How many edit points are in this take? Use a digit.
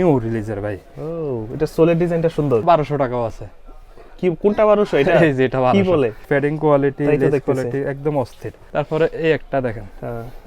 3